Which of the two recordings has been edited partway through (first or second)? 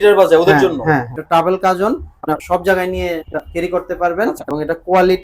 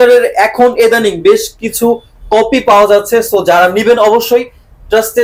first